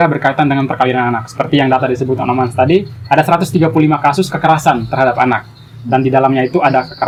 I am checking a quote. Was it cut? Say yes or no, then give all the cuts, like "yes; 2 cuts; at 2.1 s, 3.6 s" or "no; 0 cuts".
no; 0 cuts